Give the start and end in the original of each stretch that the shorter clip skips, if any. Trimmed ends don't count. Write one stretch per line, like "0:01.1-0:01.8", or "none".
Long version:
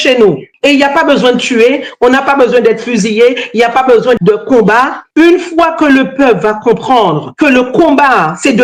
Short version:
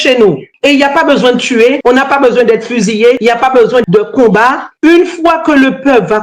0:01.8-0:01.9
0:03.4-0:03.5